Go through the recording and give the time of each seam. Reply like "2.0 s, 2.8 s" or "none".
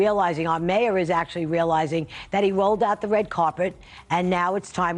none